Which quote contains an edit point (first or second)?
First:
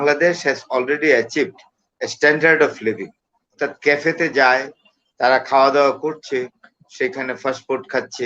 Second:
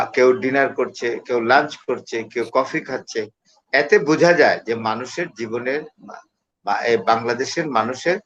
first